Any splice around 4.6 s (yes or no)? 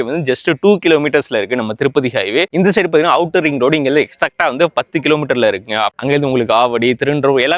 no